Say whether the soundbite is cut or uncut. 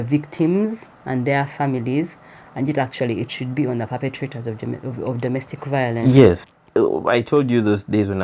cut